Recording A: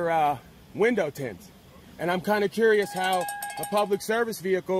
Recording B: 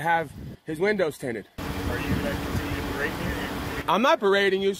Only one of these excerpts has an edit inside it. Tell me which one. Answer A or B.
B